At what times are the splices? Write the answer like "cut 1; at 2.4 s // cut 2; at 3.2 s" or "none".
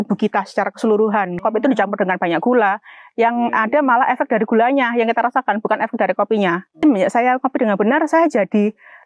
cut 1; at 1.4 s // cut 2; at 6.8 s